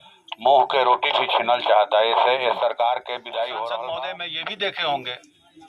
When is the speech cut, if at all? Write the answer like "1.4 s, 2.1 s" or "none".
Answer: 4.0 s